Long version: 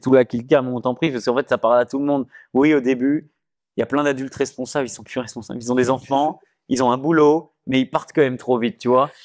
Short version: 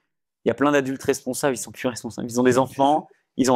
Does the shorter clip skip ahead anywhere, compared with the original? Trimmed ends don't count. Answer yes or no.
no